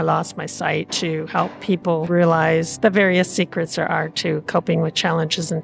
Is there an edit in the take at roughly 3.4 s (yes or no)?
no